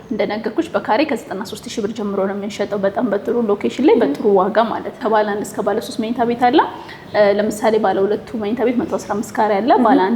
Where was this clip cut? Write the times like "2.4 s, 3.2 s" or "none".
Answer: 5.0 s

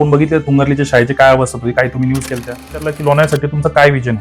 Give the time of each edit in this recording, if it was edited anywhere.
2.9 s

